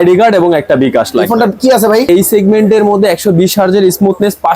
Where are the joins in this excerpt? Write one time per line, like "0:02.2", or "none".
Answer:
0:02.1